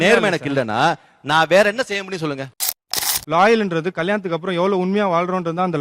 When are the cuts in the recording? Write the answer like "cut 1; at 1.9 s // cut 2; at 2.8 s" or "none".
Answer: cut 1; at 2.7 s